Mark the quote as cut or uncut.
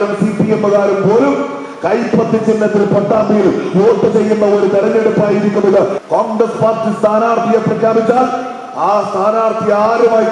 cut